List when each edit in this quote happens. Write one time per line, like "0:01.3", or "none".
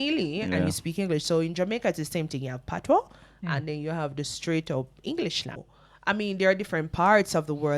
0:05.7